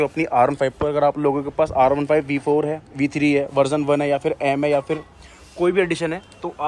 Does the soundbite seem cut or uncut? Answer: uncut